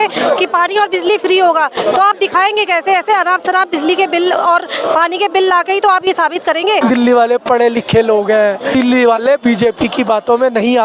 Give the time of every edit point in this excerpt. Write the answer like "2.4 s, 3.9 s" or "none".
6.8 s, 8.7 s